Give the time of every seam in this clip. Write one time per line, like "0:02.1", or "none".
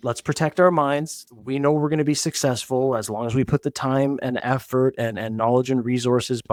none